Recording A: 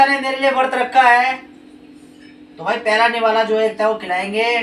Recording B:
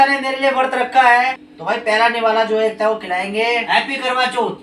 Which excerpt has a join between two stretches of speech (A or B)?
B